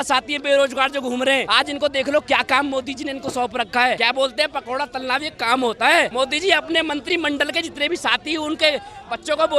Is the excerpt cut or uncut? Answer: cut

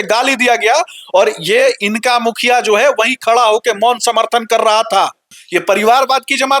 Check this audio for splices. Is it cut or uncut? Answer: cut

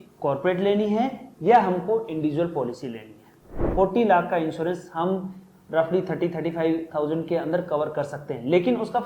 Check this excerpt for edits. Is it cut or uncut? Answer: cut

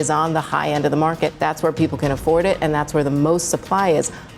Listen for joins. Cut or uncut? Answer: cut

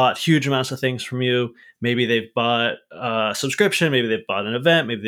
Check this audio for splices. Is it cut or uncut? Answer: cut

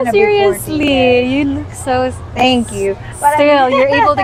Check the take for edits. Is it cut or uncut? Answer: uncut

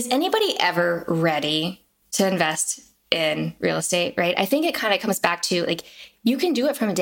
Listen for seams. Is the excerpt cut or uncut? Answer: uncut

